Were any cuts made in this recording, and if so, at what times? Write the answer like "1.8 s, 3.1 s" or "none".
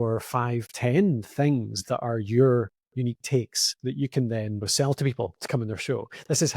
3.6 s, 4.7 s